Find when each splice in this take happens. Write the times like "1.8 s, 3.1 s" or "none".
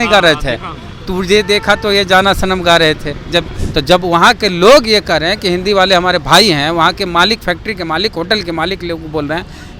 3.6 s